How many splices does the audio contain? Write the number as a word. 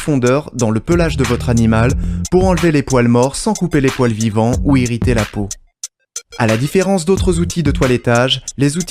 zero